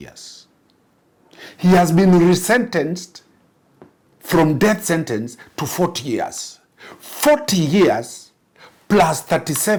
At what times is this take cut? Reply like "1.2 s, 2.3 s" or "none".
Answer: none